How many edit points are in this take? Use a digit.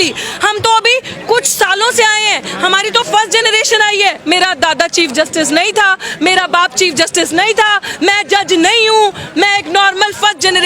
1